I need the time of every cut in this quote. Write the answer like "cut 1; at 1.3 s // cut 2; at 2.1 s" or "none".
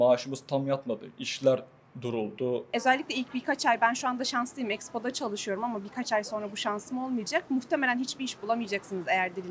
cut 1; at 2.7 s